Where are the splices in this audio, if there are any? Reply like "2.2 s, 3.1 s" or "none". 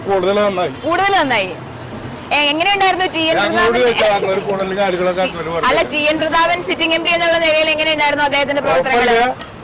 none